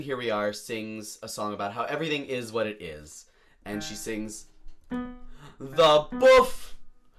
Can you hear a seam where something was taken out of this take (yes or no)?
no